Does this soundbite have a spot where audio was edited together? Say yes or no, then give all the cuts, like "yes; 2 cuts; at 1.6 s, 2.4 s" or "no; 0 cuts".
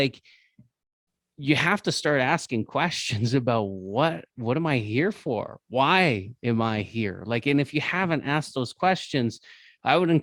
no; 0 cuts